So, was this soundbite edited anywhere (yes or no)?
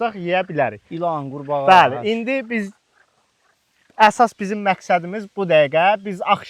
no